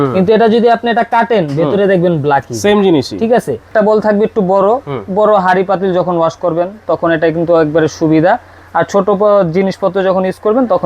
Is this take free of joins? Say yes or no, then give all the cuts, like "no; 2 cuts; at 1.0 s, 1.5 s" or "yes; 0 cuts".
no; 1 cut; at 3.7 s